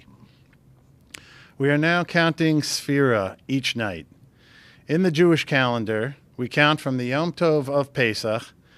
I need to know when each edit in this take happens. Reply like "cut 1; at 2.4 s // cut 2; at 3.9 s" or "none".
cut 1; at 3.3 s